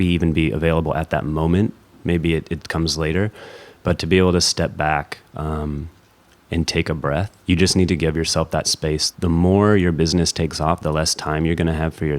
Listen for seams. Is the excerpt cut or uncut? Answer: cut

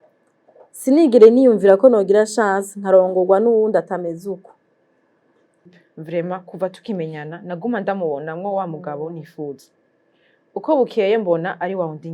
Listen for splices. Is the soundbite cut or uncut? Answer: cut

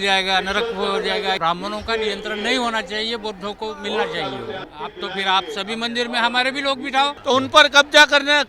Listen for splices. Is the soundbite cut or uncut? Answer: cut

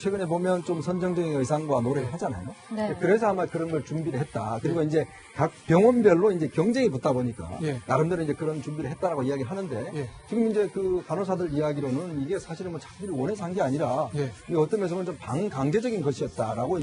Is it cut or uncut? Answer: uncut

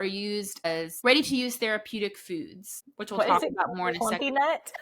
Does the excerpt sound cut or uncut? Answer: cut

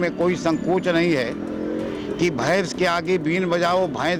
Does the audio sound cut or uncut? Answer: uncut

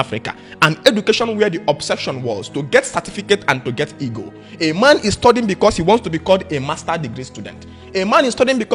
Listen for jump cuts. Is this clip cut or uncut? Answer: uncut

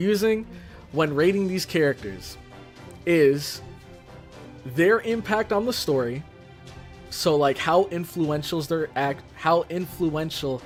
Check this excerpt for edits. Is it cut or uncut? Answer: uncut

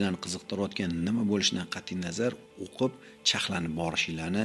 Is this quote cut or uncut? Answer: uncut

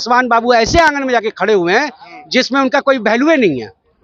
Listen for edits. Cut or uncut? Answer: uncut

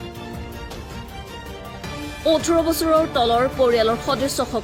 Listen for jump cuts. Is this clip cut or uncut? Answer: uncut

